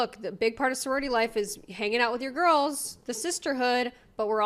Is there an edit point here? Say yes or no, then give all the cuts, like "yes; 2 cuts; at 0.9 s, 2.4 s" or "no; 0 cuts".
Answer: no; 0 cuts